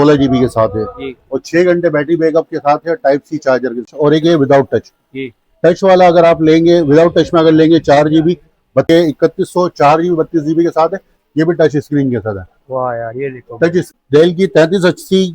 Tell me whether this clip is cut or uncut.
cut